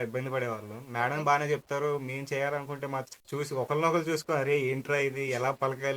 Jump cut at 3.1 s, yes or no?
yes